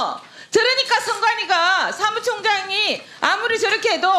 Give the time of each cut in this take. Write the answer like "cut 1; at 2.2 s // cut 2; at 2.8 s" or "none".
none